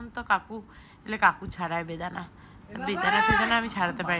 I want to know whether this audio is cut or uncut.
uncut